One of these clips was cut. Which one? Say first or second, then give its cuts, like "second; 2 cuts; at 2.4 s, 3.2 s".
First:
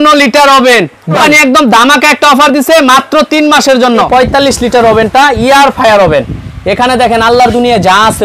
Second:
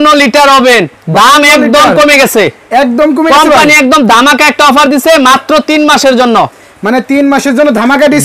first; 2 cuts; at 1.2 s, 4.1 s